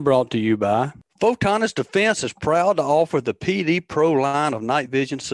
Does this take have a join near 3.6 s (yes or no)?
no